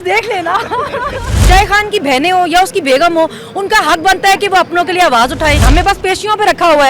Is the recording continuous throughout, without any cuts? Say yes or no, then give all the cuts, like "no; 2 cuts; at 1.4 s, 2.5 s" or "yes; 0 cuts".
no; 2 cuts; at 1.3 s, 5.6 s